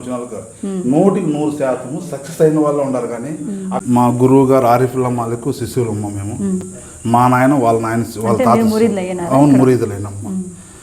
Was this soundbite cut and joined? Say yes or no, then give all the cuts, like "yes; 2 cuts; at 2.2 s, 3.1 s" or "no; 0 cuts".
yes; 1 cut; at 3.8 s